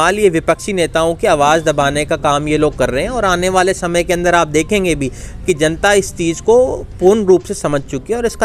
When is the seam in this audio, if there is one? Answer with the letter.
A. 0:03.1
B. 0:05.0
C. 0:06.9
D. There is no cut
D